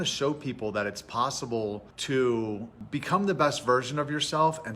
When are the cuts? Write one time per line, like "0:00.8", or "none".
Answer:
0:01.9
0:02.7